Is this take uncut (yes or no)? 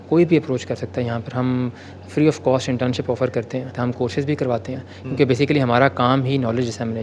no